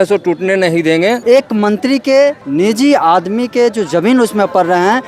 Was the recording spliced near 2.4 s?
yes; 2 cuts; at 1.2 s, 2.4 s

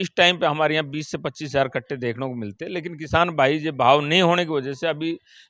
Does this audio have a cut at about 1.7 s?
no; 0 cuts

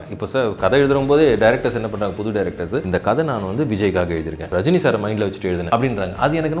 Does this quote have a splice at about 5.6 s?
yes; 3 cuts; at 2.9 s, 4.4 s, 5.6 s

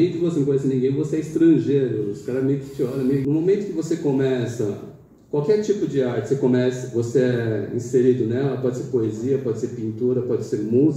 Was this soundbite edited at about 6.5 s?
no; 1 cut; at 3.2 s

